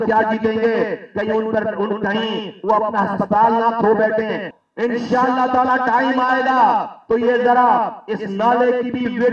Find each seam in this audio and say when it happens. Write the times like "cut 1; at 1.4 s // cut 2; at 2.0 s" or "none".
cut 1; at 4.6 s